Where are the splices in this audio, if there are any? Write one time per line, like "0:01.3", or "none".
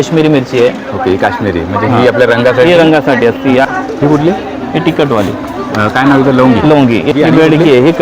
0:03.7
0:07.1

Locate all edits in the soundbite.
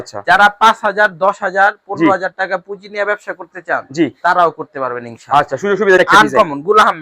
0:06.0

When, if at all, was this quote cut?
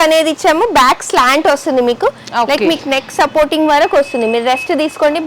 none

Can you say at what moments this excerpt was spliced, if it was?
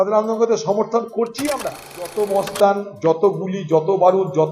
0:01.4

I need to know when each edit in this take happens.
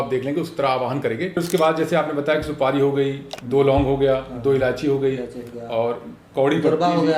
0:01.4

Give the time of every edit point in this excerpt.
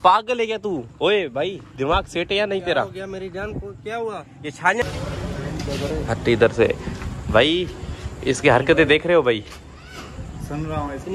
0:04.8
0:07.2

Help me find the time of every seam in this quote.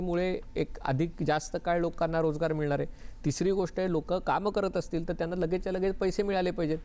none

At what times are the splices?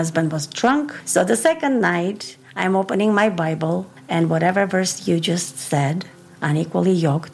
0:01.0
0:04.0

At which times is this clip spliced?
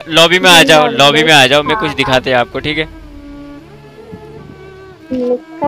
none

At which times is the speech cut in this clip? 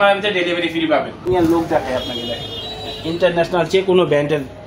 0:01.2

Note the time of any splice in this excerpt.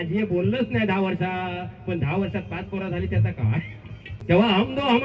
0:04.1

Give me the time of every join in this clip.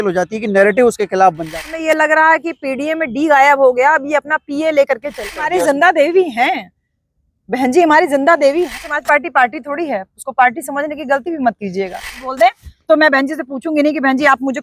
0:01.5
0:05.3
0:08.9
0:12.1

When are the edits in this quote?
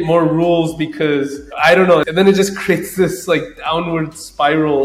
0:01.4

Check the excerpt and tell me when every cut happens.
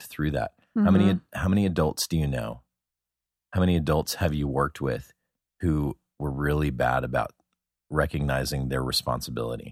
0:07.9

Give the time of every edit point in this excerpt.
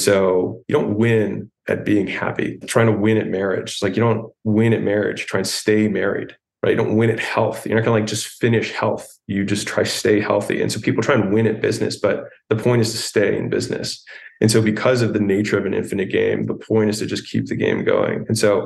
0:01.5
0:02.6

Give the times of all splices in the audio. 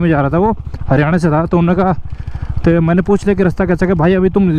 none

